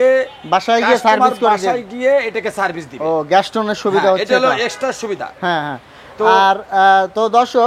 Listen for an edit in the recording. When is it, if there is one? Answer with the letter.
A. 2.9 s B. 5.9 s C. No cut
C